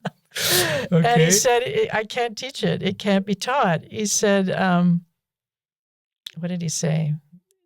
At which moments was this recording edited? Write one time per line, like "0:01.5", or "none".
none